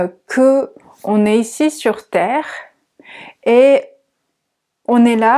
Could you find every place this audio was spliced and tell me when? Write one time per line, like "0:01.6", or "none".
none

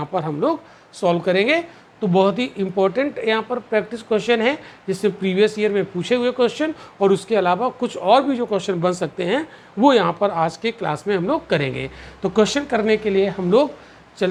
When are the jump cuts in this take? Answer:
none

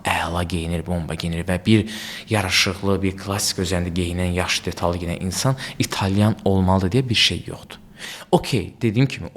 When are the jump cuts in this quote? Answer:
none

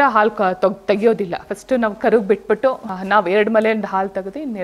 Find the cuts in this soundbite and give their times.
0:02.9

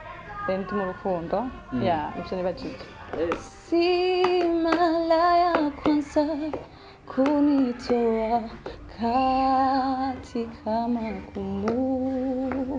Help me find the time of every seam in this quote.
0:03.3

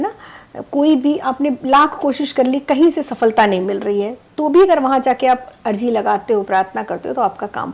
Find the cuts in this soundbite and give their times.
none

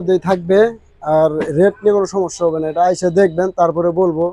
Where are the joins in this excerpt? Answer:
none

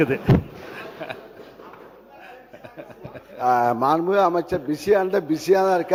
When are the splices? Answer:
none

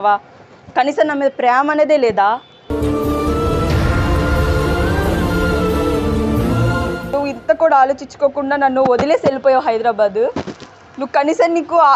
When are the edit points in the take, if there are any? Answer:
0:07.0

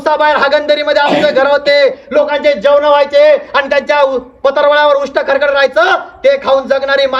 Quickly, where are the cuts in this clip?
none

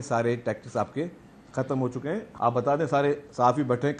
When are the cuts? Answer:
0:02.3

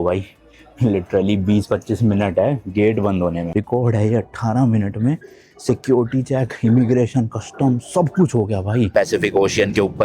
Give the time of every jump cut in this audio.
0:03.4
0:08.9

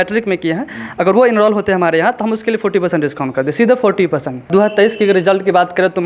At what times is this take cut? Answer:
0:04.5

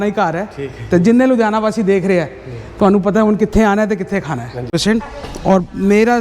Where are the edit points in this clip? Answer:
0:04.7

